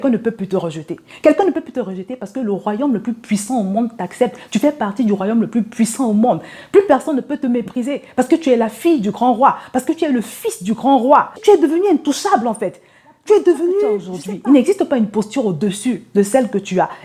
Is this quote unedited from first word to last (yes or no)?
yes